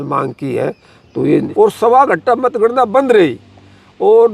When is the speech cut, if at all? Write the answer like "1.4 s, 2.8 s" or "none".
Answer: 1.3 s

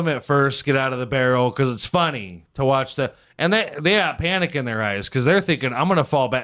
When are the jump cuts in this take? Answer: none

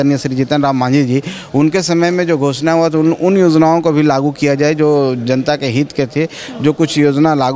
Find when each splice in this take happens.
none

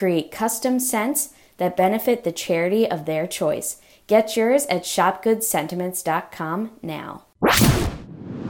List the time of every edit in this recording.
7.2 s

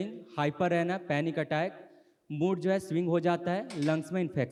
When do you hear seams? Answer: none

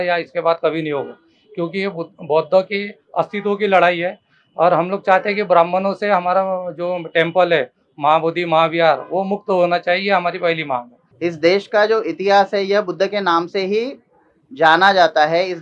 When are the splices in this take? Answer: 11.0 s

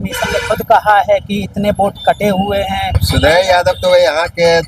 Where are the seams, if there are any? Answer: 3.0 s

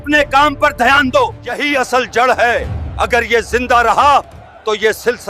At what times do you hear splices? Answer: 1.5 s

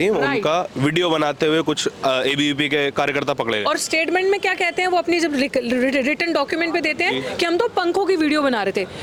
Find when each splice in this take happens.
none

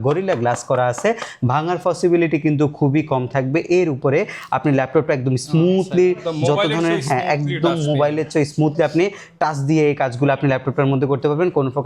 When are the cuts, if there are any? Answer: none

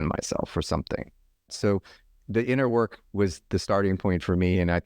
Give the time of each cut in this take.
1.5 s

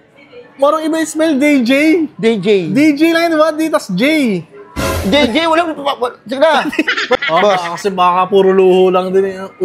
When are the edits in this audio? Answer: 7.2 s

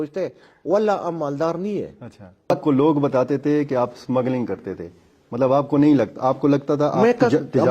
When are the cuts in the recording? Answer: 2.5 s

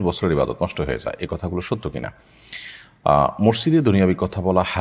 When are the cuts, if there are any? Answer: none

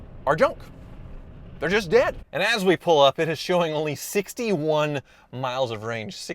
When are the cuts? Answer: 2.2 s

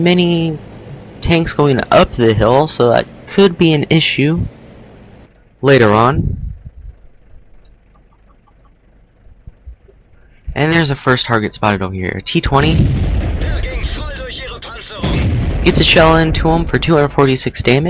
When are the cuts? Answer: 13.3 s

